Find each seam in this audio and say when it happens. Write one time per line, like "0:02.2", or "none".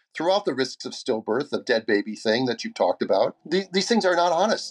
0:03.4